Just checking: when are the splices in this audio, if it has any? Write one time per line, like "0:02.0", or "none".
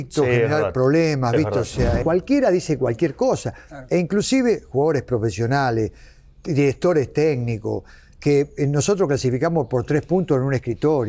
0:02.0